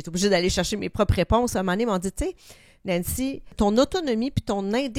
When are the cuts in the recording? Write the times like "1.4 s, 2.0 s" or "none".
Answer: 3.5 s